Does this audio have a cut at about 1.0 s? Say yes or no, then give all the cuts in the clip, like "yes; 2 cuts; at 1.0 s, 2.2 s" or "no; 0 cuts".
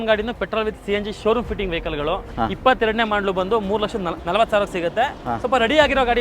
no; 2 cuts; at 2.3 s, 4.2 s